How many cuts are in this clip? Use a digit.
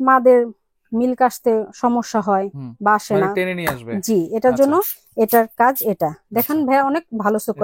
0